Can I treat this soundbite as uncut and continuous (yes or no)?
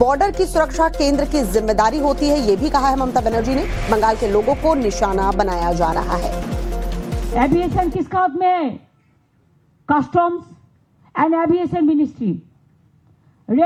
yes